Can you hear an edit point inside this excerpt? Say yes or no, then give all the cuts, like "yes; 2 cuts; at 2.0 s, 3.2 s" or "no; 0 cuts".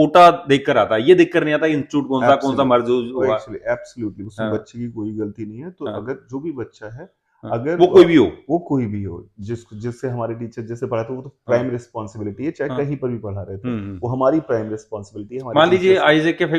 no; 0 cuts